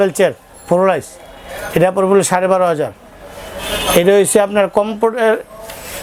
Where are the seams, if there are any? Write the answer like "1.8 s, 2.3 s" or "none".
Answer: none